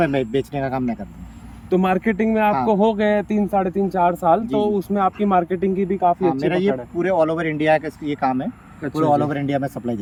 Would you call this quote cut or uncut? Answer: uncut